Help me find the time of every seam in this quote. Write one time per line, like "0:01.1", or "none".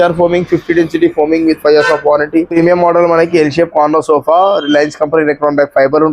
0:02.5

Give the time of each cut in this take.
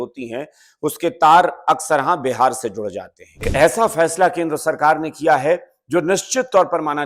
0:03.5

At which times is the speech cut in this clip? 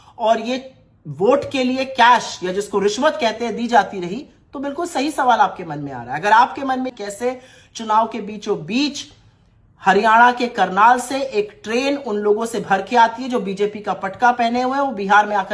0:06.9

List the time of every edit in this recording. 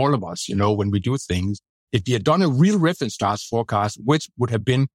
0:01.7

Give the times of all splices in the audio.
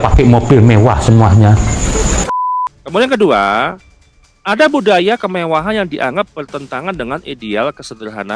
0:02.2

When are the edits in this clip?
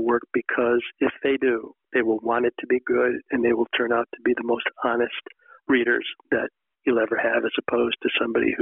0:01.8

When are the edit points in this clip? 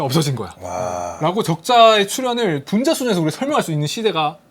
0:01.1

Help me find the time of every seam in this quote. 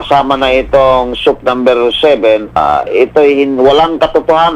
0:02.6

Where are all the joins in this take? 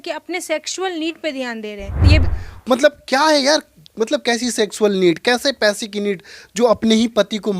0:02.2

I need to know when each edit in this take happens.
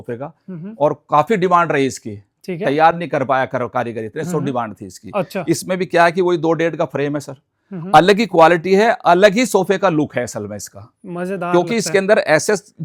none

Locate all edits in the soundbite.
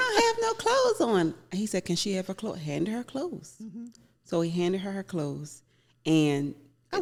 none

